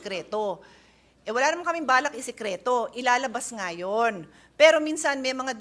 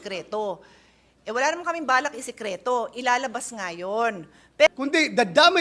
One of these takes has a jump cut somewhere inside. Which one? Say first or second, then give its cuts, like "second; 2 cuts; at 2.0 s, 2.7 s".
second; 1 cut; at 4.7 s